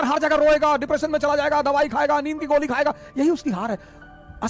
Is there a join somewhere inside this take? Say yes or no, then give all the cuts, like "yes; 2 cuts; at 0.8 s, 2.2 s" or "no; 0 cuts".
no; 0 cuts